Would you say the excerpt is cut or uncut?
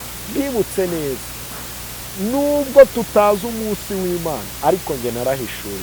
uncut